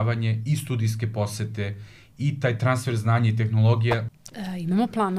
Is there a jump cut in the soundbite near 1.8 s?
no; 1 cut; at 4.1 s

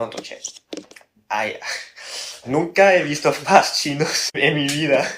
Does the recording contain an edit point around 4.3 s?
yes; 1 cut; at 4.3 s

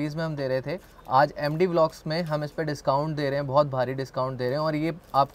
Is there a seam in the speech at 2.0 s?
no; 0 cuts

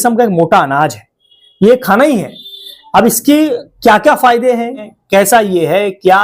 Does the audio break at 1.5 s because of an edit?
no; 1 cut; at 4.9 s

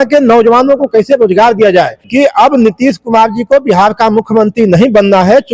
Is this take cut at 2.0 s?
yes; 1 cut; at 2.0 s

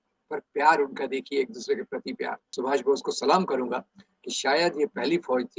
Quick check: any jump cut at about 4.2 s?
no; 1 cut; at 2.5 s

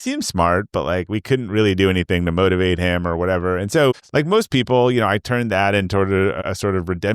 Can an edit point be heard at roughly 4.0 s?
yes; 2 cuts; at 4.0 s, 6.4 s

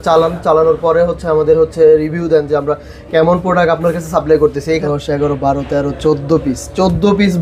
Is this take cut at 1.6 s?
no; 1 cut; at 4.8 s

